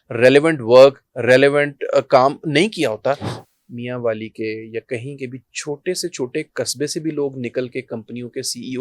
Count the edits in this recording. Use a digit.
1